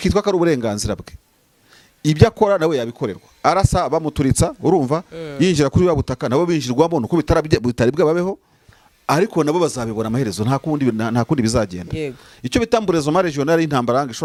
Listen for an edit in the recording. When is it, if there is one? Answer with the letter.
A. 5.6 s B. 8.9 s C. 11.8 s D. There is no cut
D